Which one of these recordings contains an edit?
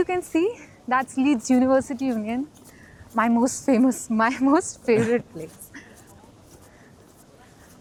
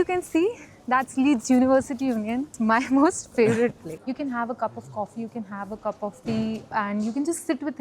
second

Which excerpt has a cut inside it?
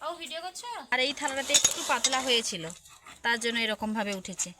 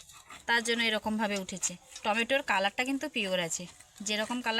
first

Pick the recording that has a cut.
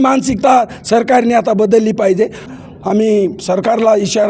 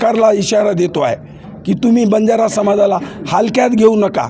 first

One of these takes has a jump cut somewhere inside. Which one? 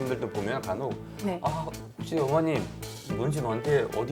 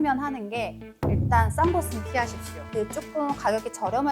second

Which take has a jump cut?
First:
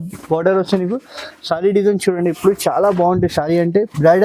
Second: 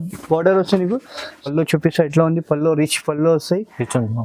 second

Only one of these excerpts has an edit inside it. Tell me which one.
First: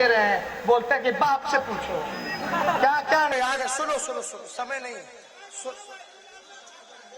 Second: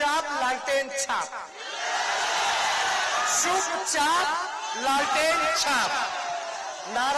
first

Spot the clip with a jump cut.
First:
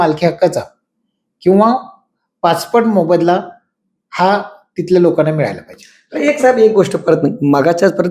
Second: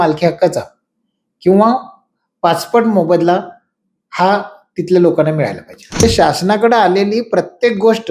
second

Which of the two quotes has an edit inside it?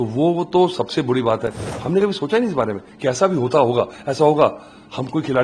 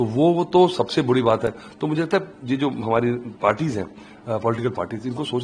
first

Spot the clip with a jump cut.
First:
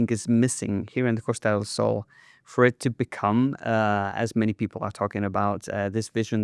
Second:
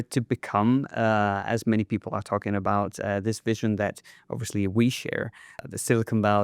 second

